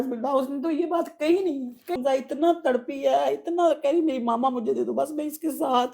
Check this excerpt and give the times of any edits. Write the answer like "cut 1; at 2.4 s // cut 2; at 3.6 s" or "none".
cut 1; at 1.9 s